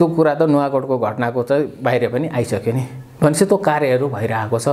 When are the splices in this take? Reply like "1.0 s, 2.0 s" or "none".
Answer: none